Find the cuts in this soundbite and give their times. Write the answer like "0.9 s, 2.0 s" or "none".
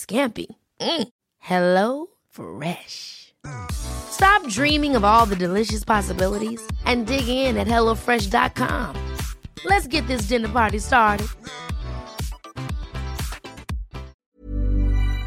14.3 s